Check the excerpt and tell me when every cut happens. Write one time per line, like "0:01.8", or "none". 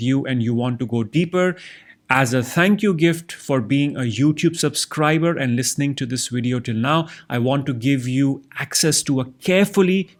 none

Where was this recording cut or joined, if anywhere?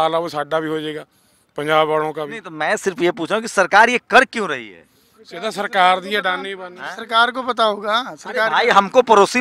none

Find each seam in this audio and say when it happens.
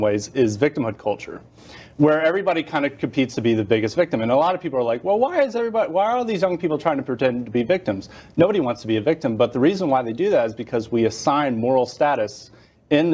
none

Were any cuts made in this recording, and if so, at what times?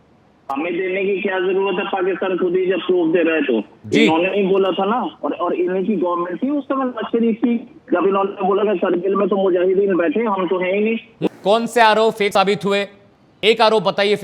0:11.1

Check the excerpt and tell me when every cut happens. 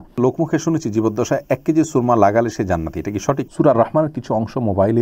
0:03.4

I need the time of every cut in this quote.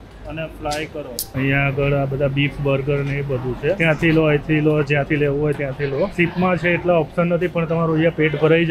0:01.3
0:03.8
0:06.1

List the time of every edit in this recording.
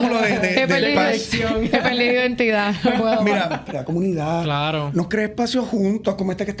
0:03.7

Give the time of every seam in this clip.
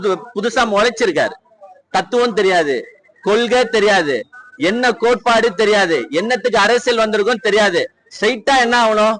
none

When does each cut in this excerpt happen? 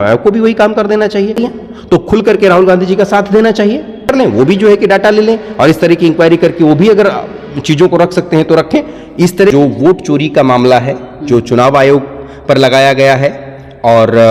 0:01.5
0:04.1
0:09.5

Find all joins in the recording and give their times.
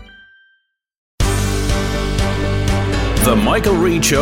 0:01.0

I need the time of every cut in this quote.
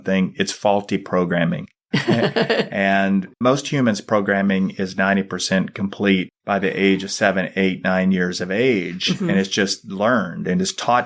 0:01.7
0:03.4

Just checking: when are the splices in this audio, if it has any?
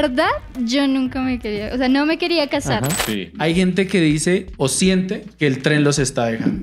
0:03.0

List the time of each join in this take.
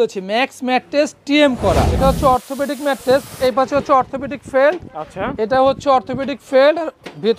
0:02.0
0:03.3

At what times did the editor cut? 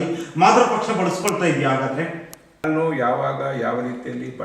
0:02.7

